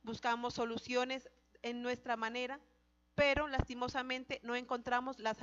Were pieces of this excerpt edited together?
no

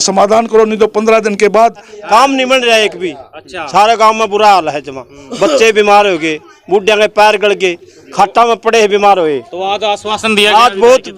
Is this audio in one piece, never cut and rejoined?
no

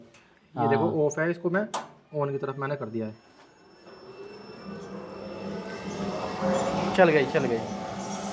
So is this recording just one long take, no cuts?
yes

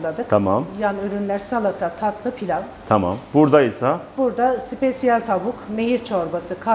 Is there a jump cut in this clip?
no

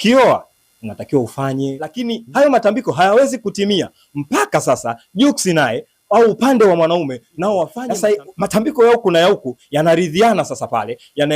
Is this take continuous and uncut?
no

